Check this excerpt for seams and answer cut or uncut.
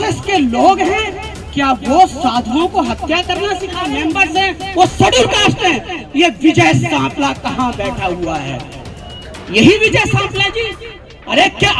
cut